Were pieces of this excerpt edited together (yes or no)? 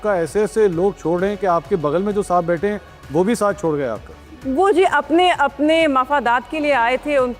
no